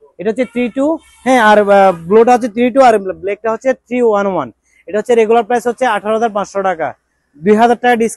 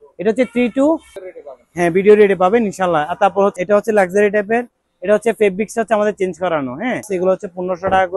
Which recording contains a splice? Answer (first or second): second